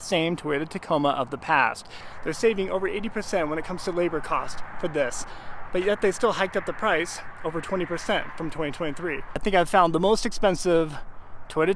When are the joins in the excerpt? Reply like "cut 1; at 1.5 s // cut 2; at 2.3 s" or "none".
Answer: cut 1; at 2.0 s // cut 2; at 9.4 s